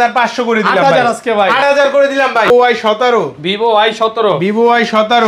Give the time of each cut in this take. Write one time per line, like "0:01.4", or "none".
0:02.5